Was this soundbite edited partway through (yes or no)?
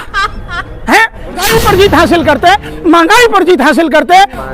yes